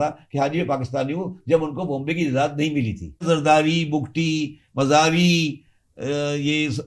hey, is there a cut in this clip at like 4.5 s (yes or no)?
no